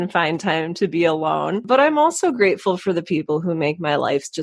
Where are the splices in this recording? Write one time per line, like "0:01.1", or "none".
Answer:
0:01.6